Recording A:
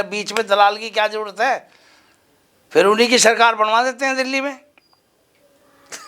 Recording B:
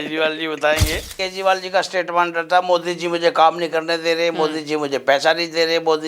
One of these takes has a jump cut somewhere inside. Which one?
B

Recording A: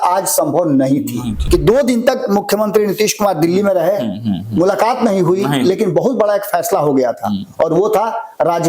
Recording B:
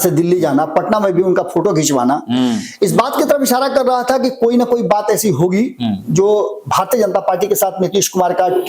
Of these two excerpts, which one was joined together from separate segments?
A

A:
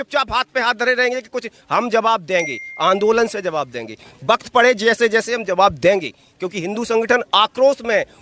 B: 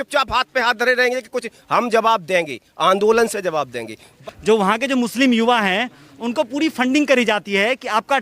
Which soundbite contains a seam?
B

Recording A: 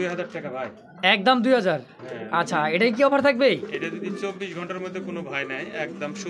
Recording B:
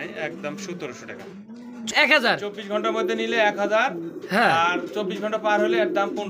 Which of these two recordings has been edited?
B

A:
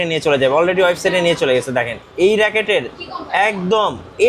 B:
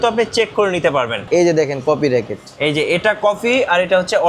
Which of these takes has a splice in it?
B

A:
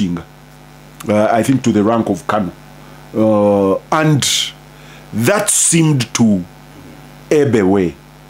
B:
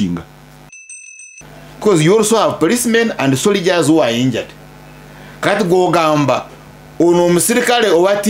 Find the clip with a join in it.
B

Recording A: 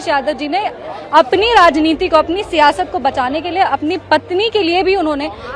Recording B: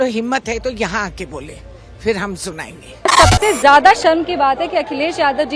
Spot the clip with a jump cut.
B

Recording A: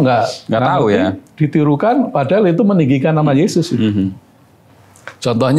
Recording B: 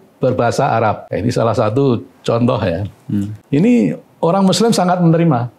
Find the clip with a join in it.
B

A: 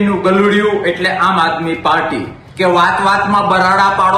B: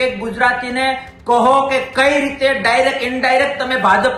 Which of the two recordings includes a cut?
A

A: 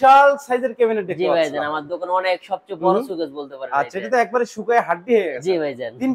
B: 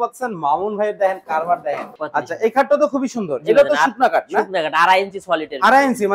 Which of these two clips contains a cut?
B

